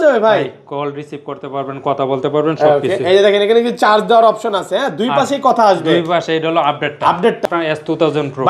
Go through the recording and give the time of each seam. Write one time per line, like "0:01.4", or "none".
0:07.4